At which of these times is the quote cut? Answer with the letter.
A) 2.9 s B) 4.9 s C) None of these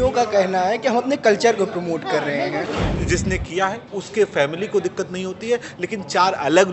A